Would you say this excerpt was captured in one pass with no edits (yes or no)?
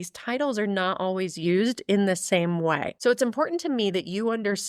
no